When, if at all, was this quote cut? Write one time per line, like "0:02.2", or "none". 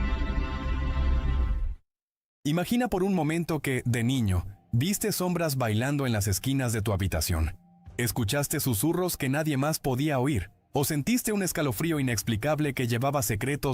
0:01.0